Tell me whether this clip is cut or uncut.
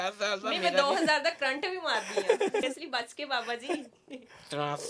cut